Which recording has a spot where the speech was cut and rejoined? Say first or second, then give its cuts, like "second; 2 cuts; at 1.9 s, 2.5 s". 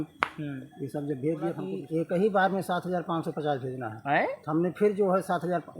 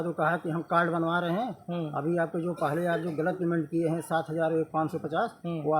first; 1 cut; at 1.7 s